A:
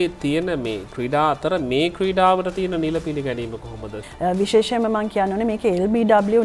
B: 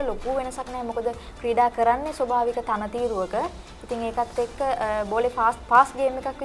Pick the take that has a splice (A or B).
A